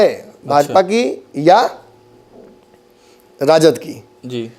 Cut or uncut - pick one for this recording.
uncut